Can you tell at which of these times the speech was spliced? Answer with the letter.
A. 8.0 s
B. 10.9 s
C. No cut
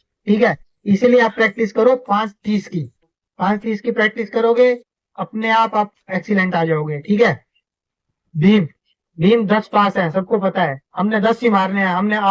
A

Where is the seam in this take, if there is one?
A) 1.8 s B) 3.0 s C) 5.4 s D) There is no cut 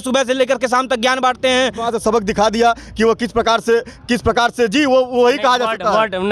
A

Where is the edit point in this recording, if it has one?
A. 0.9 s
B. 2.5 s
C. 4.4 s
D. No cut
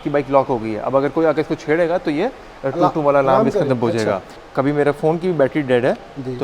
C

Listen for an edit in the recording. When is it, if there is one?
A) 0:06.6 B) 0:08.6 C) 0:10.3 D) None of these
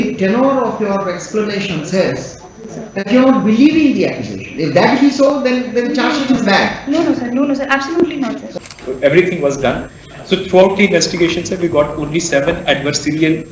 B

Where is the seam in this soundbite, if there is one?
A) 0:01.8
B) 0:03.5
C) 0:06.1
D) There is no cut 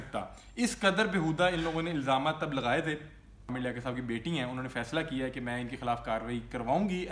B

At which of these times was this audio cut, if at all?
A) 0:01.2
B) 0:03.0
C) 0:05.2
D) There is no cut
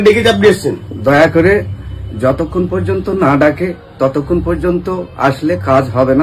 D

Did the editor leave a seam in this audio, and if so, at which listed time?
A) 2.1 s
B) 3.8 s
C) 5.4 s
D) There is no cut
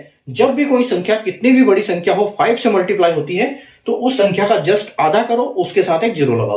D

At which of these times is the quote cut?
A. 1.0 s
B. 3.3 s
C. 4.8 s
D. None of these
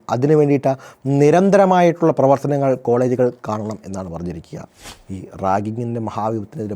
C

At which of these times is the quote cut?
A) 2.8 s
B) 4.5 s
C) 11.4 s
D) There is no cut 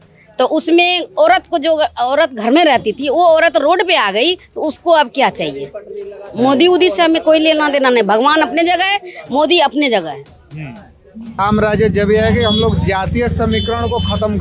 C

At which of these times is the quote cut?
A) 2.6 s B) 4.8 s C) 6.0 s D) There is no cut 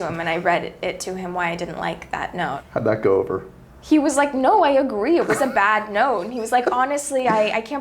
A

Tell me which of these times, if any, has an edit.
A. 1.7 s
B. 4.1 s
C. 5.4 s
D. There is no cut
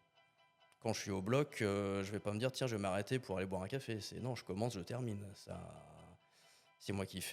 D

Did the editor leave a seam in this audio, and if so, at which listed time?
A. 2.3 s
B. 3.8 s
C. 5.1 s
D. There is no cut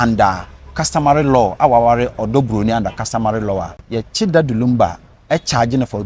B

